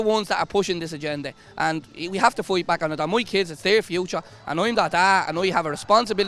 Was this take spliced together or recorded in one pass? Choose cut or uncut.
uncut